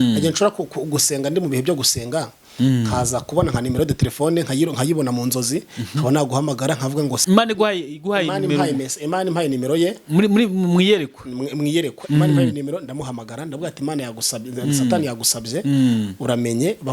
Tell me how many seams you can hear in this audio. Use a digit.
1